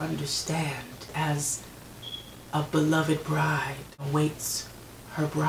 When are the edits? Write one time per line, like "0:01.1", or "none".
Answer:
0:01.1
0:04.0